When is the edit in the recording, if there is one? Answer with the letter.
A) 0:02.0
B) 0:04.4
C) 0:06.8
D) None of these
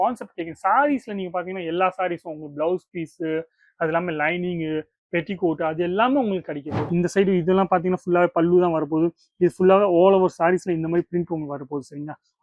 C